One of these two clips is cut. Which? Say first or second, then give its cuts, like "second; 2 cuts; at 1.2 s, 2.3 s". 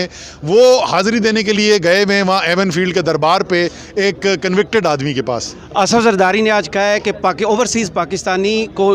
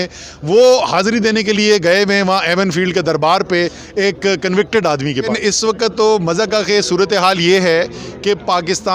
second; 1 cut; at 5.3 s